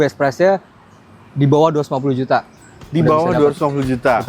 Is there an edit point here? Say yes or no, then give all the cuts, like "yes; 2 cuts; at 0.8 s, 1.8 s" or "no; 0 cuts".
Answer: no; 0 cuts